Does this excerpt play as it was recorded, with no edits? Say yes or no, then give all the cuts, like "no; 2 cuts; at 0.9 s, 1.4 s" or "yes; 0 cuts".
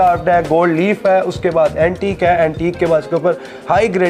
yes; 0 cuts